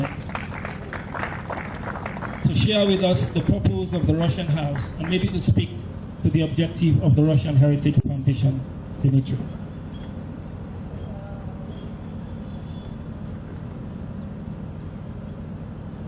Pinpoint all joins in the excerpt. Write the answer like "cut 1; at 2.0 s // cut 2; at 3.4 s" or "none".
none